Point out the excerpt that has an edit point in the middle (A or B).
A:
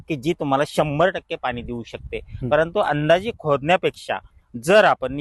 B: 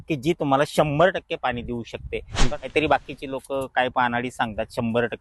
B